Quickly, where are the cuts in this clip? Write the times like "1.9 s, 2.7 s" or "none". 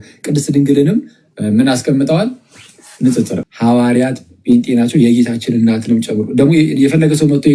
3.4 s